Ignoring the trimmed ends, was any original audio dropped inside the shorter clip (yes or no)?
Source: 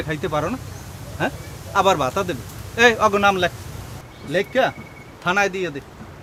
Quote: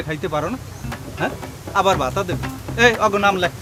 no